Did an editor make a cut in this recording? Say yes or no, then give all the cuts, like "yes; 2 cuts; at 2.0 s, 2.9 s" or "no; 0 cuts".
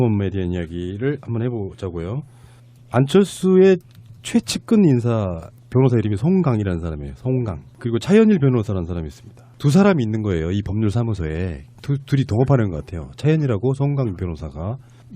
yes; 1 cut; at 12.3 s